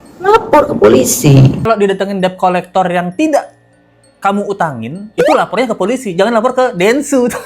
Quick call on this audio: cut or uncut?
cut